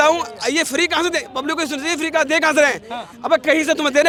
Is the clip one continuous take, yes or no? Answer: yes